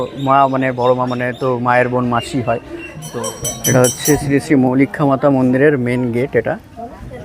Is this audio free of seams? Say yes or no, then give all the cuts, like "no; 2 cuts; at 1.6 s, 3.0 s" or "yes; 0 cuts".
no; 1 cut; at 3.0 s